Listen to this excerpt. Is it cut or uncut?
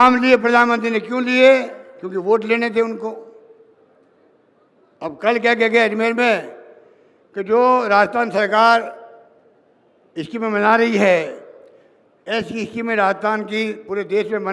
uncut